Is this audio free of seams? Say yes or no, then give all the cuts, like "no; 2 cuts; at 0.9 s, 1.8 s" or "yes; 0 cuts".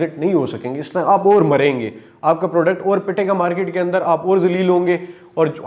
yes; 0 cuts